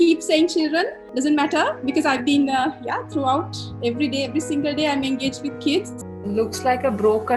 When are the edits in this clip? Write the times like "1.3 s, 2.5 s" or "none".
1.0 s, 6.0 s